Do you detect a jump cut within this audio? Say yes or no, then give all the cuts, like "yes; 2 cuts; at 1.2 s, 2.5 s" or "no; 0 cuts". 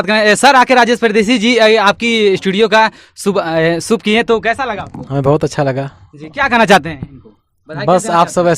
no; 0 cuts